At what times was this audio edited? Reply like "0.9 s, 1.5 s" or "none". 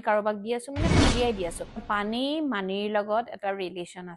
1.9 s